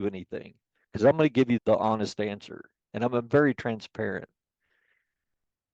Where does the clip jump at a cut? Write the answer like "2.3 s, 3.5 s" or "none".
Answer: 1.6 s